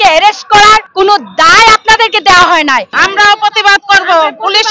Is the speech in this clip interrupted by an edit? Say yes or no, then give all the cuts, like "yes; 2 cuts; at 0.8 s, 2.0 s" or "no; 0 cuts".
yes; 2 cuts; at 0.9 s, 2.9 s